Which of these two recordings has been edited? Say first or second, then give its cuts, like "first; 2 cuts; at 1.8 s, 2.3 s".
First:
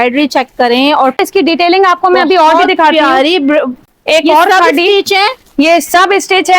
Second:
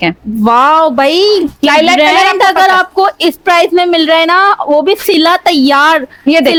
first; 2 cuts; at 1.2 s, 3.8 s